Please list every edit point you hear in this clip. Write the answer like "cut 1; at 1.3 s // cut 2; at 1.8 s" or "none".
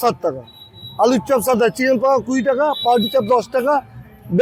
none